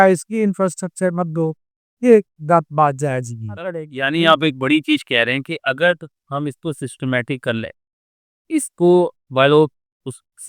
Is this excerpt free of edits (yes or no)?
no